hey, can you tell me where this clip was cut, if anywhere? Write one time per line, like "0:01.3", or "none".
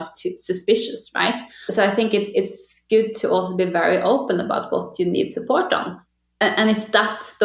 0:01.6
0:06.0